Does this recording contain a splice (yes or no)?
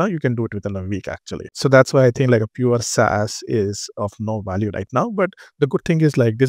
yes